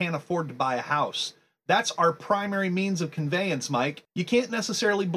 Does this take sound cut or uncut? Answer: cut